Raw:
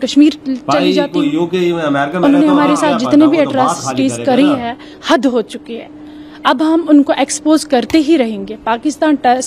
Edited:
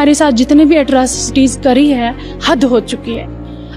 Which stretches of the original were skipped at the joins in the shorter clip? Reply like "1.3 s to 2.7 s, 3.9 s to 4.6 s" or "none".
none